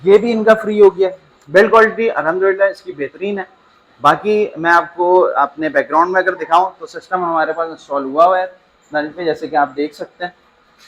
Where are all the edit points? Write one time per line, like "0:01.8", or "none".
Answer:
0:01.2